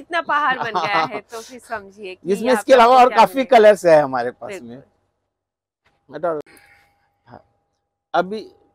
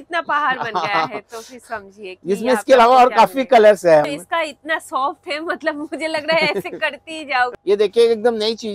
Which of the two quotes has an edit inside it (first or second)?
second